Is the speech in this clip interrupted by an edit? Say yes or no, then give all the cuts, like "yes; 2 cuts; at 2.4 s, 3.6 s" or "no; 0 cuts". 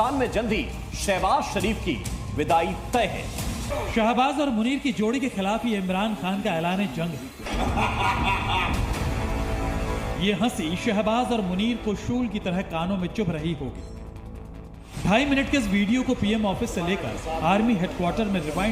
no; 0 cuts